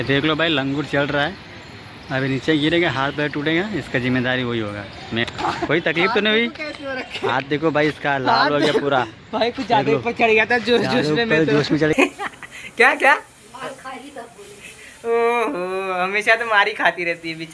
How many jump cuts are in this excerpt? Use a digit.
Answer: 2